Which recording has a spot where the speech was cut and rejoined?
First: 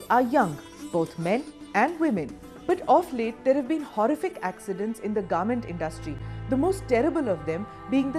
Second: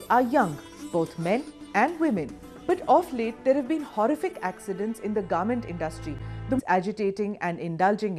first; 1 cut; at 6.6 s

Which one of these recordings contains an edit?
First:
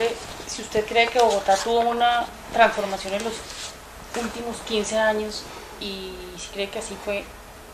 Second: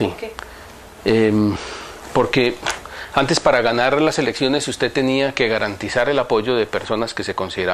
second; 1 cut; at 1.5 s

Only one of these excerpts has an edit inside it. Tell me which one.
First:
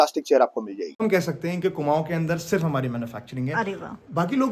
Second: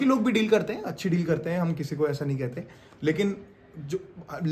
first; 1 cut; at 1.0 s

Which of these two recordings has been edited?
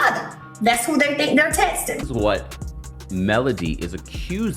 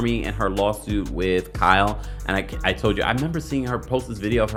first; 1 cut; at 2.0 s

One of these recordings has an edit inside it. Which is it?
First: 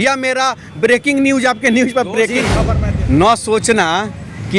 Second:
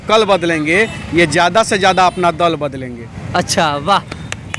first; 1 cut; at 2.6 s

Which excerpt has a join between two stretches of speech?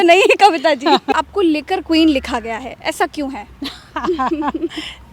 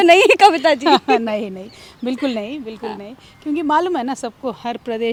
first; 1 cut; at 1.1 s

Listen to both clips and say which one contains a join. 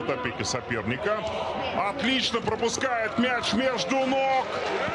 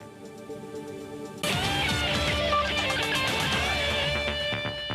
second; 1 cut; at 1.5 s

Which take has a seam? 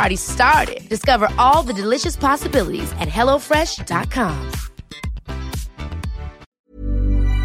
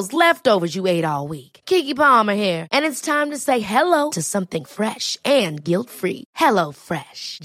first; 1 cut; at 6.5 s

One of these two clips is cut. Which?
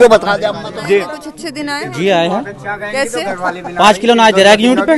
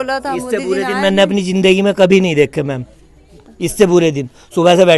first; 1 cut; at 1.1 s

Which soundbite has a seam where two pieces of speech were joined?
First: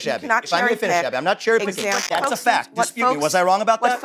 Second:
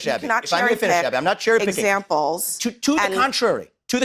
first; 1 cut; at 2.0 s

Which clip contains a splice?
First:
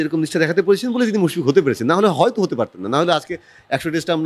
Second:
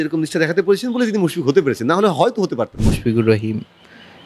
second; 1 cut; at 2.8 s

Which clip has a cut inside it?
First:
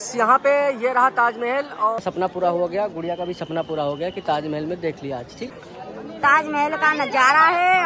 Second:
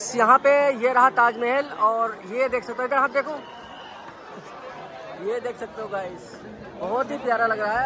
first; 2 cuts; at 2.0 s, 5.5 s

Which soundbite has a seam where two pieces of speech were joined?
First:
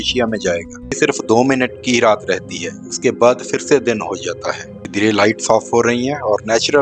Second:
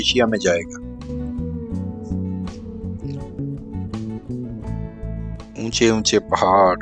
first; 2 cuts; at 1.0 s, 4.9 s

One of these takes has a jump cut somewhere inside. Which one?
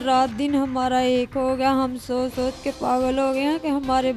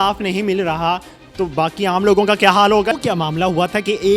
second; 1 cut; at 2.9 s

